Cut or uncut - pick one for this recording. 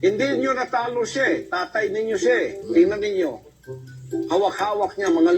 cut